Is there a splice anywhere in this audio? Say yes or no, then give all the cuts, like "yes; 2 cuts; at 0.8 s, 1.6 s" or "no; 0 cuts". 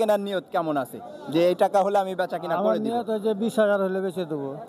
no; 0 cuts